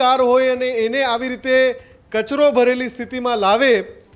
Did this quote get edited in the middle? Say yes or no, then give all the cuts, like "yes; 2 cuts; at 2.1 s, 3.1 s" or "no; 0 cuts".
no; 0 cuts